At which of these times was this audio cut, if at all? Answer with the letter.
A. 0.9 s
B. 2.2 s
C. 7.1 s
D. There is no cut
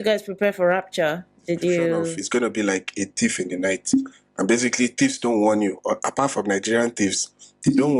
B